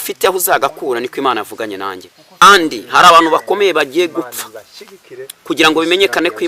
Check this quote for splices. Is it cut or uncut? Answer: cut